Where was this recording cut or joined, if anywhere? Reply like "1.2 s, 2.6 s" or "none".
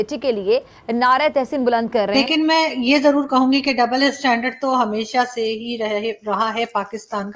2.3 s